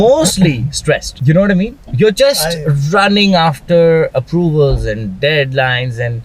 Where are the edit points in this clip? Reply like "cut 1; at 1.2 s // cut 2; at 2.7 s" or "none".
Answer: cut 1; at 1.1 s